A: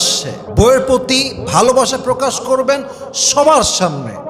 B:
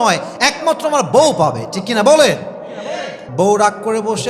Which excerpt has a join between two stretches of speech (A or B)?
B